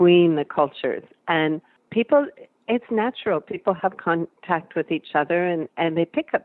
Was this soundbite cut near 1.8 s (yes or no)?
yes